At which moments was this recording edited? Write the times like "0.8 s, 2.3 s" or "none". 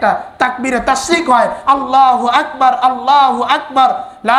none